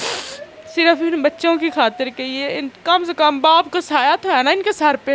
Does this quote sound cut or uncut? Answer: uncut